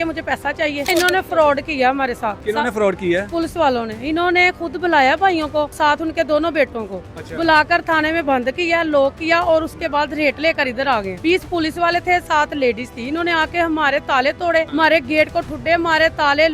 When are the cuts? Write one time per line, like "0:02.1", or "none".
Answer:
0:00.9
0:02.4
0:05.7
0:11.1
0:14.7